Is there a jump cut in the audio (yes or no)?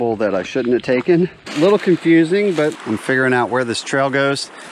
yes